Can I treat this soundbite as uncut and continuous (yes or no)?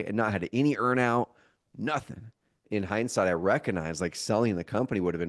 no